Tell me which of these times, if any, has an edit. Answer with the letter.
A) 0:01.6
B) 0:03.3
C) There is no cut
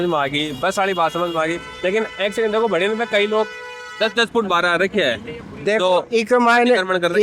C